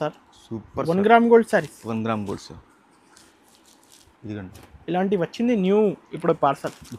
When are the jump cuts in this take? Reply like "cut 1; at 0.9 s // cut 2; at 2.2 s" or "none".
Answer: none